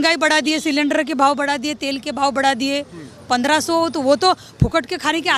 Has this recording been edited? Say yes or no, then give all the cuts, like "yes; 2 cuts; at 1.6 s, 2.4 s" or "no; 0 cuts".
no; 0 cuts